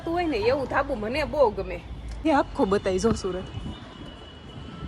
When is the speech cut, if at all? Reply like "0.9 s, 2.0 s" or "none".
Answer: 2.2 s

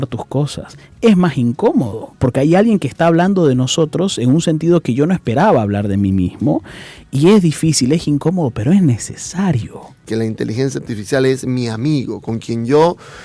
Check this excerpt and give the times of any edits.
10.0 s

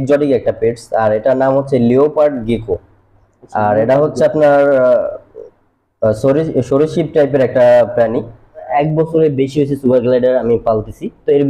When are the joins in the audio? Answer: 8.7 s

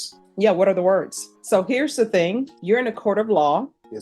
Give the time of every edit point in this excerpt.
1.3 s, 2.5 s

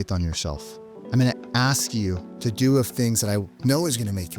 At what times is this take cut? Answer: 2.3 s, 3.5 s

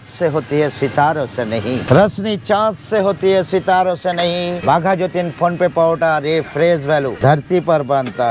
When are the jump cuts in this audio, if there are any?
1.8 s, 4.6 s, 7.1 s

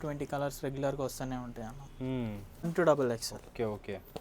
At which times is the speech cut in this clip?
2.7 s

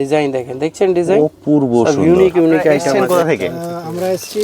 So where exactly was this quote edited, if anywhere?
2.9 s

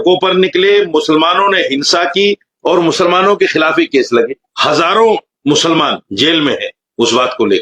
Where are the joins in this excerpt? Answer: none

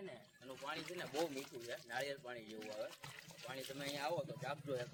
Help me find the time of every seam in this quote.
none

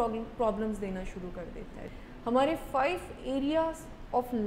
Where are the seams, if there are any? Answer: 1.8 s

